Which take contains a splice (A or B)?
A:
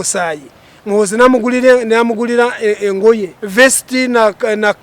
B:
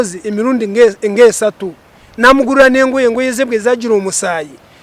A